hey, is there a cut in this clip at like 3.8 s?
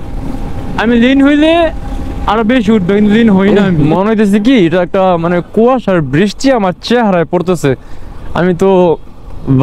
yes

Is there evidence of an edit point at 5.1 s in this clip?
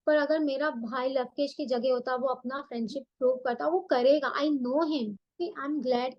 yes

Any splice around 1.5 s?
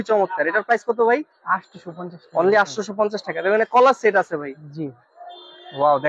no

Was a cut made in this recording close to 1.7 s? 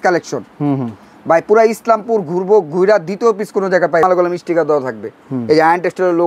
no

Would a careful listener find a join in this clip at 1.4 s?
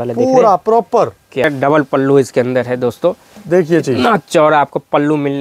yes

